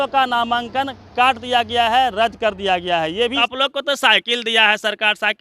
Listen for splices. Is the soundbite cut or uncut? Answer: cut